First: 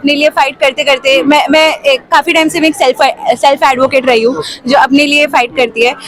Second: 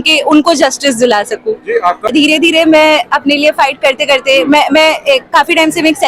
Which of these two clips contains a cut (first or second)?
second